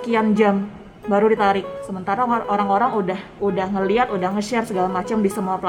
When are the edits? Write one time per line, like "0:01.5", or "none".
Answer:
0:03.3